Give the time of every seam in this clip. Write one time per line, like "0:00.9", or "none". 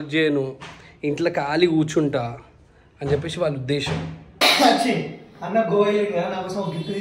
0:04.4